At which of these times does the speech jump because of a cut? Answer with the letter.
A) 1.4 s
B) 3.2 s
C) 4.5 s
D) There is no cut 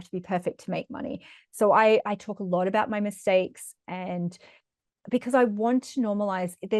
D